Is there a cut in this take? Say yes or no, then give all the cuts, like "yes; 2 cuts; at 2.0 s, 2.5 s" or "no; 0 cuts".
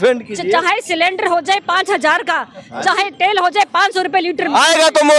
no; 0 cuts